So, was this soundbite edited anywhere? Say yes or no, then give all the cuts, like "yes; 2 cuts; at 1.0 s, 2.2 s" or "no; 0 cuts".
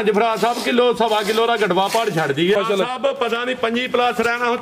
yes; 1 cut; at 2.6 s